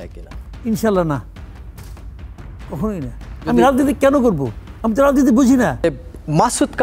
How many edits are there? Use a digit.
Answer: 1